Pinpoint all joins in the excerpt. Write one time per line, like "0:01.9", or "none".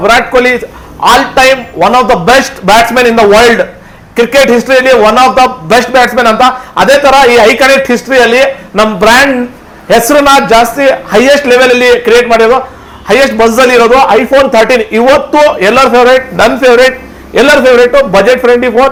none